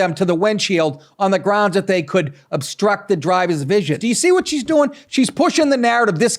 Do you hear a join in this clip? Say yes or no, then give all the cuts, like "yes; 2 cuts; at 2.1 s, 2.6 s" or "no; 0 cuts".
yes; 1 cut; at 4.0 s